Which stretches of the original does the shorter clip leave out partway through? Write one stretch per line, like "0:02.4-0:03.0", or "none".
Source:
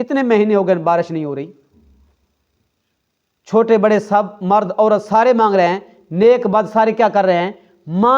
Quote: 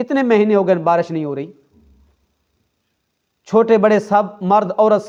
none